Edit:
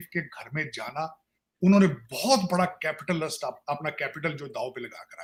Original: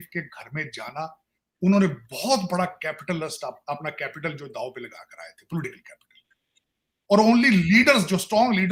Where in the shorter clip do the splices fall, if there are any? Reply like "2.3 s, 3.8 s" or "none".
none